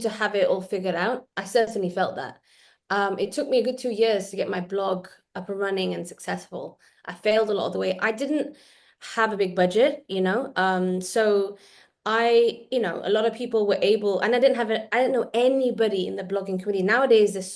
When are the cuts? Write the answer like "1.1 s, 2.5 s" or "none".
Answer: none

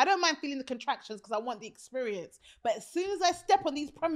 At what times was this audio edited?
none

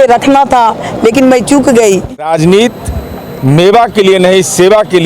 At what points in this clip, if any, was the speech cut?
2.2 s

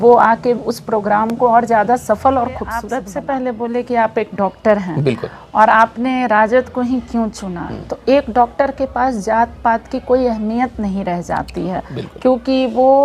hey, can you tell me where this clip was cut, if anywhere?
2.9 s

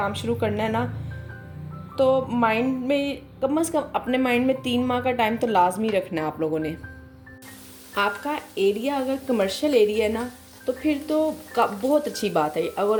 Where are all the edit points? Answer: none

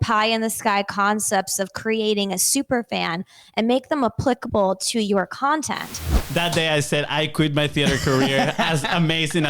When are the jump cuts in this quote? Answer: 6.2 s

